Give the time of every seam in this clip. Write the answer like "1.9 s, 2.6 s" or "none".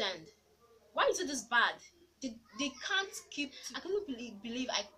3.6 s